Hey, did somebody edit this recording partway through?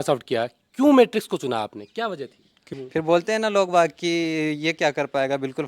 yes; 1 cut; at 2.6 s

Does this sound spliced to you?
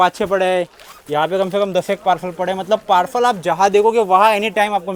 no; 0 cuts

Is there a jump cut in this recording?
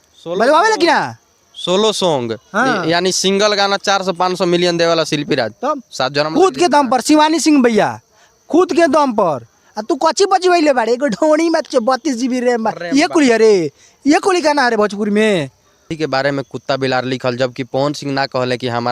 yes; 1 cut; at 15.9 s

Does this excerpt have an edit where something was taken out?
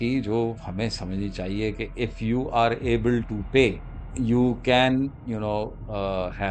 no; 0 cuts

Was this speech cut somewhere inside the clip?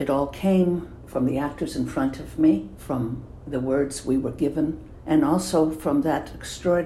yes; 3 cuts; at 1.0 s, 2.8 s, 4.9 s

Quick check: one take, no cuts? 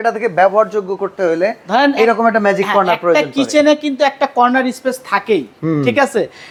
yes; 0 cuts

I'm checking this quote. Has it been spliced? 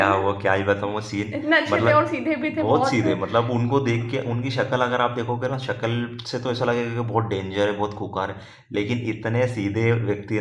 no; 0 cuts

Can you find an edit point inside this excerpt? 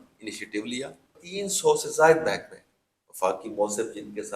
yes; 1 cut; at 1.2 s

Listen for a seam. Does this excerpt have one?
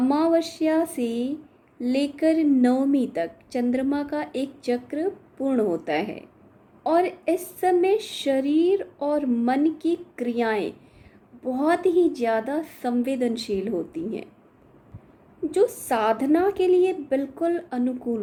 no; 0 cuts

